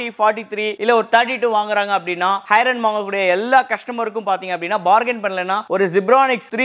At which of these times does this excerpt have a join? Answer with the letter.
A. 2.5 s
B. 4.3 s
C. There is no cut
C